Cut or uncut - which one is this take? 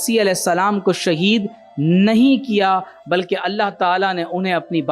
uncut